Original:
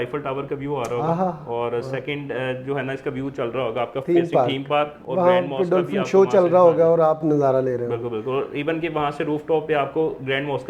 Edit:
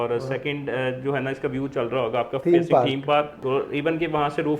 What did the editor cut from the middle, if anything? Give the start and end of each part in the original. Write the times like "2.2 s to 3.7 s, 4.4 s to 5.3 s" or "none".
5.0 s to 8.2 s

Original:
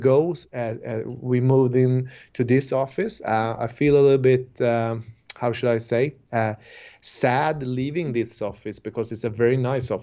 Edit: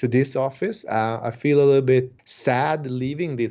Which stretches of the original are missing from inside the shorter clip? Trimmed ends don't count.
4.5 s to 6.9 s

